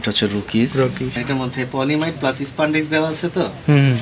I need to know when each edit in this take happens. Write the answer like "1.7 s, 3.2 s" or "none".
1.2 s